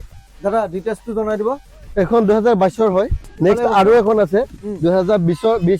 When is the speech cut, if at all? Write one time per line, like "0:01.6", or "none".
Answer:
0:03.2